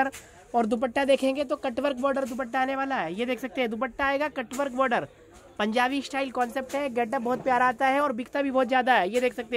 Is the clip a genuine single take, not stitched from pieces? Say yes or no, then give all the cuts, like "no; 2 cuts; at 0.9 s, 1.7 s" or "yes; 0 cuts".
yes; 0 cuts